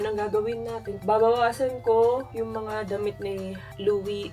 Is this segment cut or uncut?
cut